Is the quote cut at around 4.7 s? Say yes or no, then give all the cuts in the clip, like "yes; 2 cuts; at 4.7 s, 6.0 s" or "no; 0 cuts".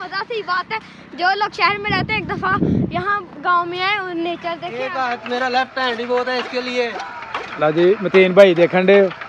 yes; 1 cut; at 4.7 s